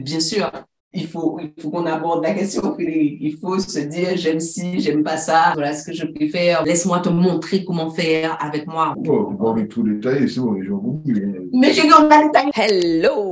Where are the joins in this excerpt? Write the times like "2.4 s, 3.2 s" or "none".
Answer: 5.5 s, 6.6 s, 9.0 s, 12.5 s